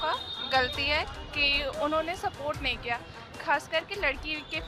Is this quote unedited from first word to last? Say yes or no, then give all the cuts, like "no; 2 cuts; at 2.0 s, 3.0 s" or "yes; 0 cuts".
yes; 0 cuts